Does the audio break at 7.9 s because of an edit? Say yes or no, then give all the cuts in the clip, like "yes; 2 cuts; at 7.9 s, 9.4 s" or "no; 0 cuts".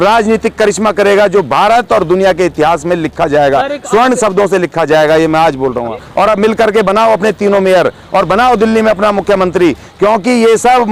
no; 1 cut; at 6.0 s